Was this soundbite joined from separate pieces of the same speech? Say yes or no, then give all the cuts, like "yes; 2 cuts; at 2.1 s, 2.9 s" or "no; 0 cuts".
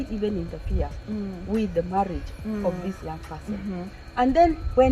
no; 0 cuts